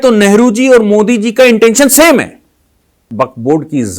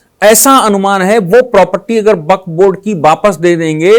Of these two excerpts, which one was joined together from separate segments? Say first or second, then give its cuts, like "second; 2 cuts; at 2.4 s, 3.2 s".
first; 1 cut; at 3.1 s